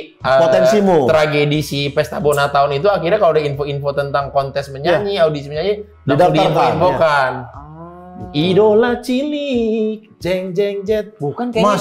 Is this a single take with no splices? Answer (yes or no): yes